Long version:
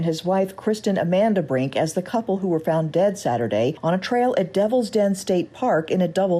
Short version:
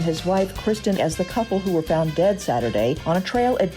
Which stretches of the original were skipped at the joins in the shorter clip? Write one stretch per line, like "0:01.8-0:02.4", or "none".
0:01.0-0:01.7